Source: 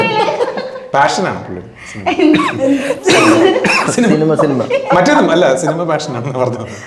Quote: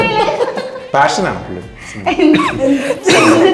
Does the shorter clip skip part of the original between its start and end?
no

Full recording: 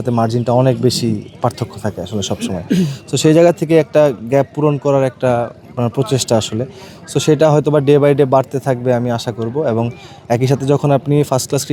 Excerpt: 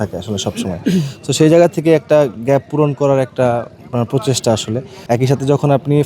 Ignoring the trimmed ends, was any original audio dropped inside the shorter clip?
yes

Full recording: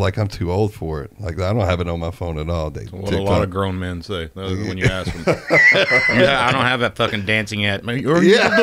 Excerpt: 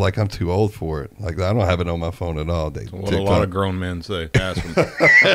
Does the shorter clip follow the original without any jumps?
no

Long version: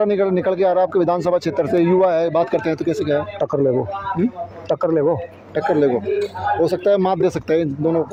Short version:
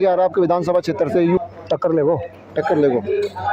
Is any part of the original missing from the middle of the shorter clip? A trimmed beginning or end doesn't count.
yes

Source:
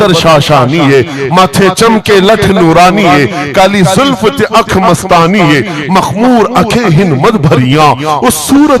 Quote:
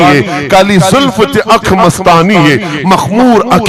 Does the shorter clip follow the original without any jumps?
yes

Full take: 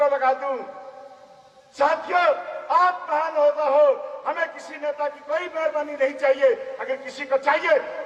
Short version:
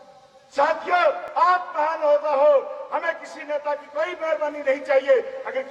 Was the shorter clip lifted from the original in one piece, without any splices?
no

